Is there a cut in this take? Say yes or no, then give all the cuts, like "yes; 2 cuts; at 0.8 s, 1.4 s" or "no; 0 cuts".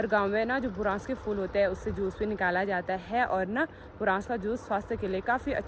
no; 0 cuts